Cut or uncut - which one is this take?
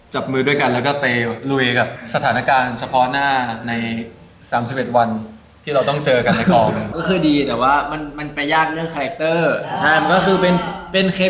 cut